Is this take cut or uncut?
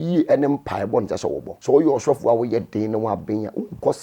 cut